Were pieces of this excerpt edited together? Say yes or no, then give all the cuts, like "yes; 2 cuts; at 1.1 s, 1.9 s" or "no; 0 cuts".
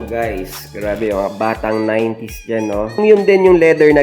yes; 1 cut; at 3.0 s